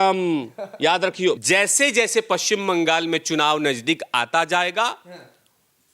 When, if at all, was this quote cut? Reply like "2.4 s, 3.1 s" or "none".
1.4 s